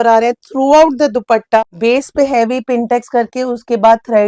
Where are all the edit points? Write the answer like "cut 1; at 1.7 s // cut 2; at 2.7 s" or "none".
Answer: cut 1; at 1.6 s